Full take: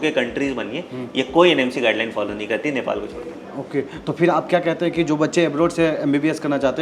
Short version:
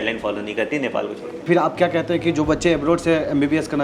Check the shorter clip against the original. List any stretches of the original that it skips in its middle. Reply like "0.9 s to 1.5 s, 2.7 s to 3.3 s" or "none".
3.4 s to 4.2 s